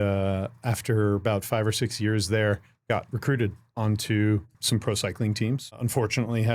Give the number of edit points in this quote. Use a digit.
2